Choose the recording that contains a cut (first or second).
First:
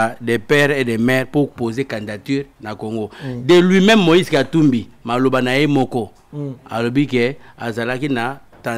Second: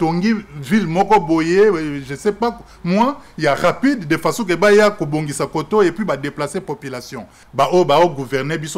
second